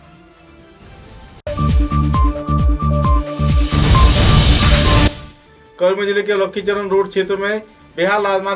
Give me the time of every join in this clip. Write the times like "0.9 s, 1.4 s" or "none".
5.2 s